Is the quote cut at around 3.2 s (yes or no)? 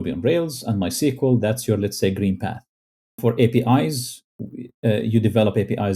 yes